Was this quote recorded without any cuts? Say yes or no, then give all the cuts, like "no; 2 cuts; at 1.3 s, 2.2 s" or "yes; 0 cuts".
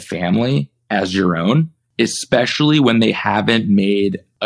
yes; 0 cuts